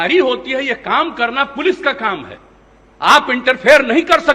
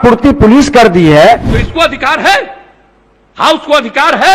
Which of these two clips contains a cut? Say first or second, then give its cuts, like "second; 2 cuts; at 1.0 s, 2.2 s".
second; 1 cut; at 1.6 s